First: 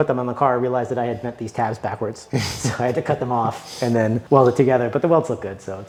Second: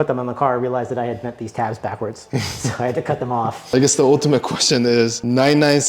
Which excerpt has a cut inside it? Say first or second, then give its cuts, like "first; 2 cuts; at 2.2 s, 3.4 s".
second; 1 cut; at 3.6 s